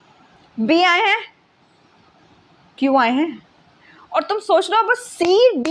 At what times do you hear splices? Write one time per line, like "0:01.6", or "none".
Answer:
none